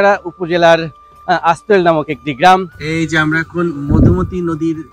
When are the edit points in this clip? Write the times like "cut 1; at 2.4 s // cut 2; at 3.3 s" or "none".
cut 1; at 2.7 s

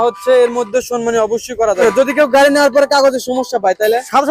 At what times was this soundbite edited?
cut 1; at 1.8 s

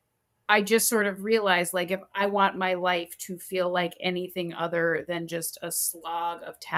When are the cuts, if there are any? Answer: none

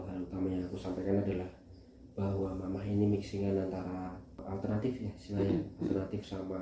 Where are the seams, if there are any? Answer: cut 1; at 4.4 s

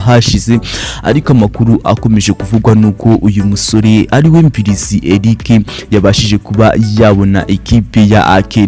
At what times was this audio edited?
none

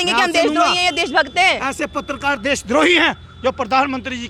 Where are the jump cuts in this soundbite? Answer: none

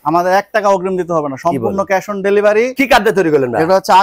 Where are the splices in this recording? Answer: cut 1; at 2.7 s

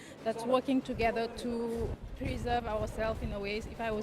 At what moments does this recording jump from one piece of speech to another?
cut 1; at 1.9 s

